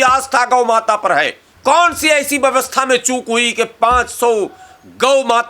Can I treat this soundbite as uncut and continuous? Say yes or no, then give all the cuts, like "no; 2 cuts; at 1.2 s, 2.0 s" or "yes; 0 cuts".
no; 1 cut; at 1.4 s